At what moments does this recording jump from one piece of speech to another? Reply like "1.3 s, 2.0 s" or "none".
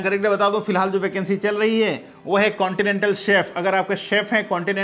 none